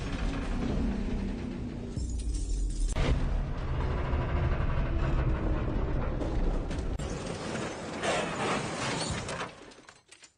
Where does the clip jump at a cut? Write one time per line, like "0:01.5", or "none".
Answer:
none